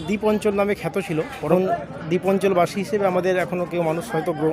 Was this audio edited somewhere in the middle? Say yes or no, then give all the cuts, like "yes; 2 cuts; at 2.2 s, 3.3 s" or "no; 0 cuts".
yes; 1 cut; at 1.5 s